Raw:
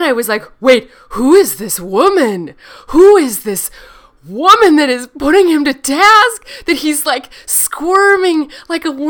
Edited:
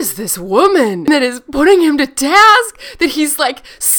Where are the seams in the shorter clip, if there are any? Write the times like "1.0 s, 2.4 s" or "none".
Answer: 1.1 s